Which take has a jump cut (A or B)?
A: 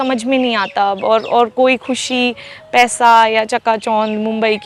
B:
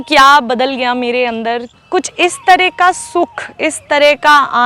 B